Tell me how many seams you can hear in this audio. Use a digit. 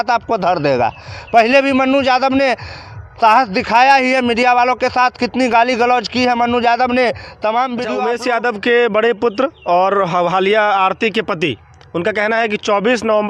1